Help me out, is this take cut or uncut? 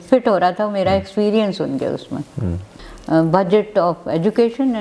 cut